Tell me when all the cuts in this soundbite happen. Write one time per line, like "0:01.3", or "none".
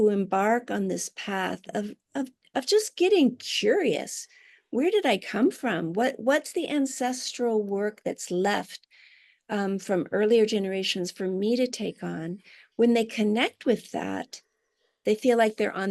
none